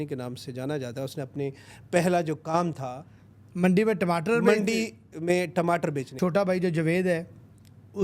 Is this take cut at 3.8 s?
no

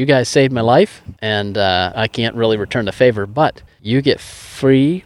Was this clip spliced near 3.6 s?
no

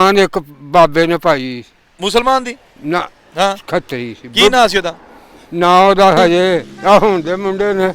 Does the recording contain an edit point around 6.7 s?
yes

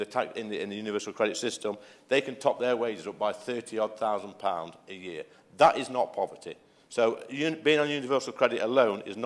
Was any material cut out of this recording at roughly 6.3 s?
no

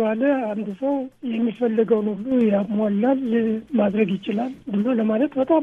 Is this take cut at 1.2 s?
yes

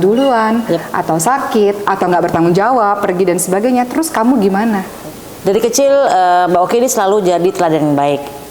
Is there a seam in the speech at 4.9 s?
yes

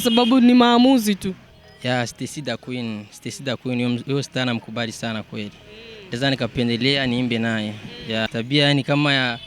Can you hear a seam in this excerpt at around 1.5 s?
yes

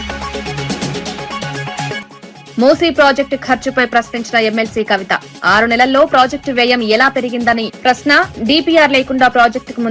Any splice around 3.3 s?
no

